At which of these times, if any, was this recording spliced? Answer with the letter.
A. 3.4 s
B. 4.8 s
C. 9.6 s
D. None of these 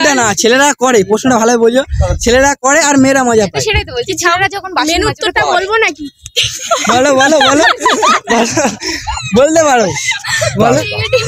C